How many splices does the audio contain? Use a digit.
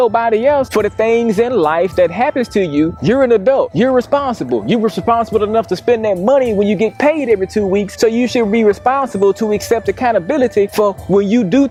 0